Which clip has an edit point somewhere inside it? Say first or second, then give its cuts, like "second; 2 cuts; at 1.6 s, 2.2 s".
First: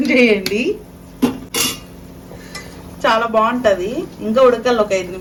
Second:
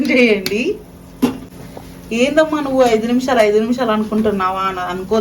second; 1 cut; at 1.5 s